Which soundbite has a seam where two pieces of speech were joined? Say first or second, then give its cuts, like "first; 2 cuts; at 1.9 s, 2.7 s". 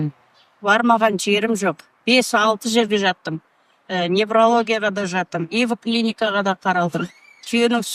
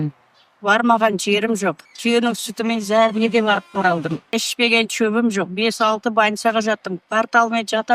second; 2 cuts; at 1.9 s, 4.3 s